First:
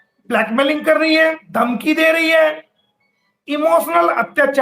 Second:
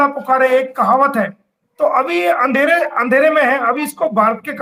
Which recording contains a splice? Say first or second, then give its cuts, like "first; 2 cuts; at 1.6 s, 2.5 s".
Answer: first; 1 cut; at 1.4 s